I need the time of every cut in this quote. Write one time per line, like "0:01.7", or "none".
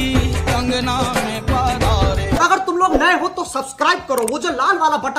0:02.6